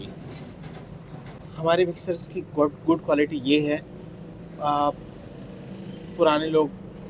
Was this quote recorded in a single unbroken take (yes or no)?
yes